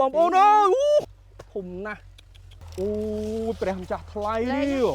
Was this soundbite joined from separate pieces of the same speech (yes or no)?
yes